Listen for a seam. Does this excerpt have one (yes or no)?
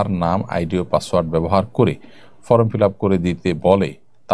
no